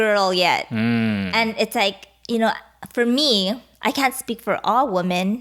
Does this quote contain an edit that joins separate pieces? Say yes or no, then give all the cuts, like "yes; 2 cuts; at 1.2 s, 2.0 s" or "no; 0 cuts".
no; 0 cuts